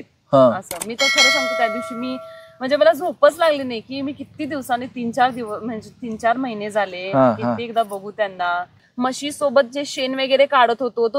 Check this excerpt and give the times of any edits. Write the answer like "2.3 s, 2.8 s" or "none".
8.9 s